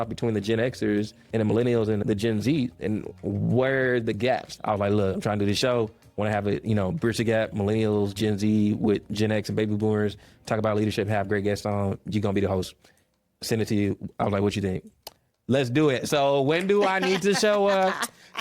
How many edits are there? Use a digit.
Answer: 3